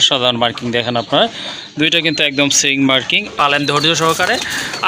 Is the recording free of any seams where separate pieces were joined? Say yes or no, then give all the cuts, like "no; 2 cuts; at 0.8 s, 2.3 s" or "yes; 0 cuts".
no; 1 cut; at 3.3 s